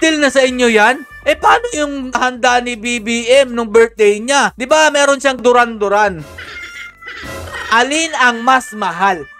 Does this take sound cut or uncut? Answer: uncut